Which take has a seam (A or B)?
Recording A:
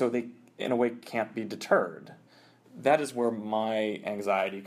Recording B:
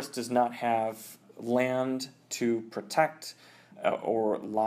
A